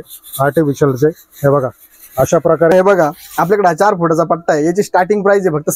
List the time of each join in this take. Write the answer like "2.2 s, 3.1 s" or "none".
2.7 s

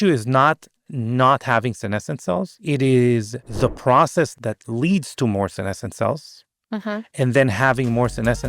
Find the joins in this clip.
2.6 s, 3.4 s, 4.3 s

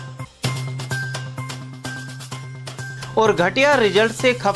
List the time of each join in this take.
1.3 s

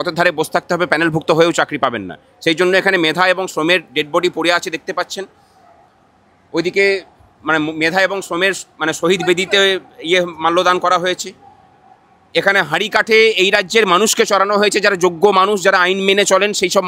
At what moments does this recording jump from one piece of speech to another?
none

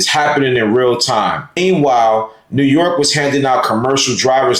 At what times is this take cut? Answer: 1.6 s

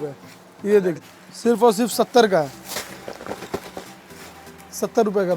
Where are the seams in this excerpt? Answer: 1.0 s

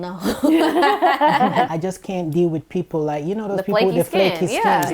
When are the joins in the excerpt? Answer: 1.7 s

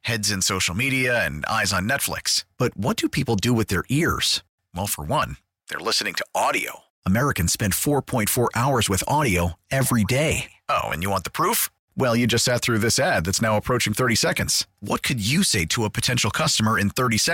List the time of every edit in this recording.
none

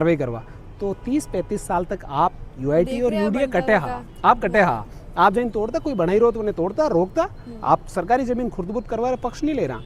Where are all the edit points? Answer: none

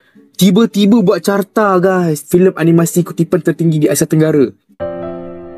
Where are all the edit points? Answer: 4.6 s

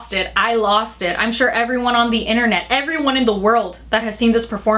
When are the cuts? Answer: none

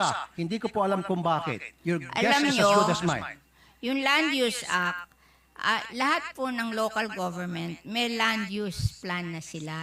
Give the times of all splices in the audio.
none

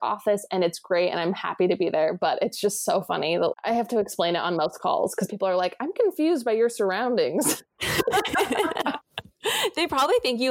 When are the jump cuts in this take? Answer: none

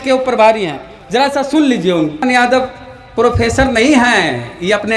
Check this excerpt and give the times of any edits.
2.2 s

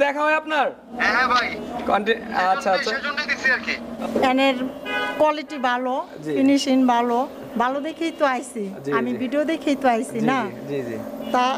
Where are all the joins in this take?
1.0 s, 3.8 s

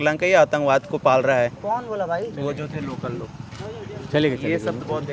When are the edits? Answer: none

